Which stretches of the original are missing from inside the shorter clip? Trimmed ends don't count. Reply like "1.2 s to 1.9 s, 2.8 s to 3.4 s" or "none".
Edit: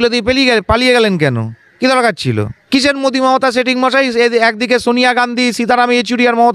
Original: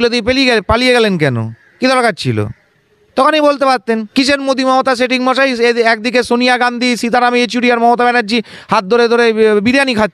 2.6 s to 4.1 s